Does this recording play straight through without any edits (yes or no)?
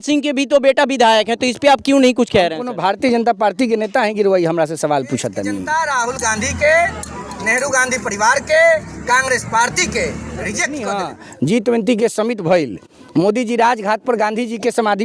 no